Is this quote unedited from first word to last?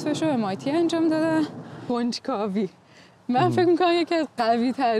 no; 1 cut; at 1.8 s

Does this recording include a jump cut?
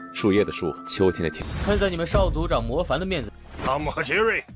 yes; 1 cut; at 1.5 s

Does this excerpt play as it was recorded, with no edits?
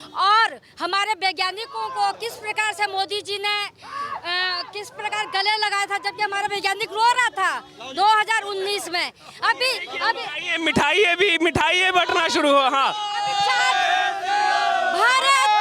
yes; 0 cuts

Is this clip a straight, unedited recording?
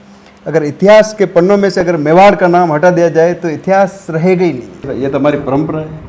no; 1 cut; at 4.9 s

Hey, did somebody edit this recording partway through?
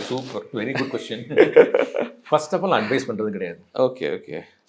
no; 0 cuts

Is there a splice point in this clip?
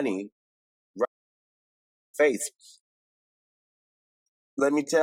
no; 0 cuts

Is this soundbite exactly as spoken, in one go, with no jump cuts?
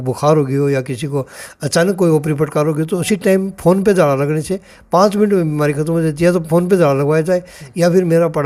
yes; 0 cuts

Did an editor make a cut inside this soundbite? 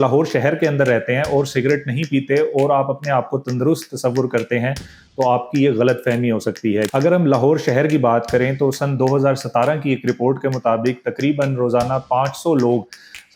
yes; 1 cut; at 6.9 s

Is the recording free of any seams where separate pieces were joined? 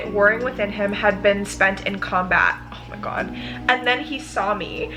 yes; 0 cuts

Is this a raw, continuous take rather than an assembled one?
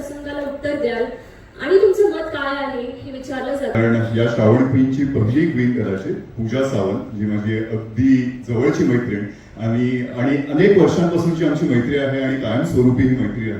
no; 1 cut; at 3.8 s

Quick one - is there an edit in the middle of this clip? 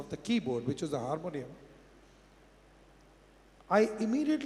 no; 0 cuts

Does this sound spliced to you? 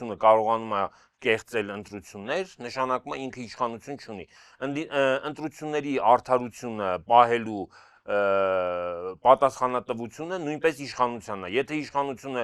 no; 0 cuts

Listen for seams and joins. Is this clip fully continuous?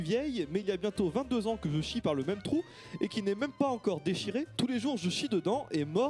yes; 0 cuts

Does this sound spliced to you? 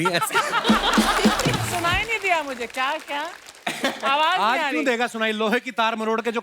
yes; 1 cut; at 1.7 s

